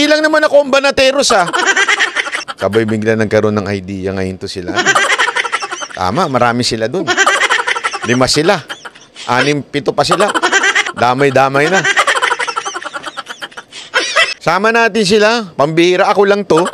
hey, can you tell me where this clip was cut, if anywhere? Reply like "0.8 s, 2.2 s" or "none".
14.3 s